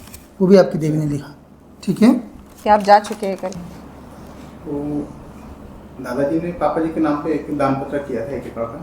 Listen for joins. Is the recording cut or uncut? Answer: cut